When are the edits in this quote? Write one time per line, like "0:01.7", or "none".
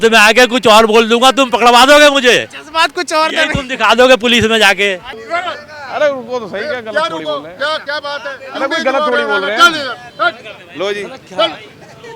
0:05.2